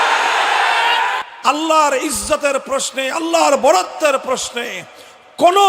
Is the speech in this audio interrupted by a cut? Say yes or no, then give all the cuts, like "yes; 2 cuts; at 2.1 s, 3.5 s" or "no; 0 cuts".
yes; 1 cut; at 1.3 s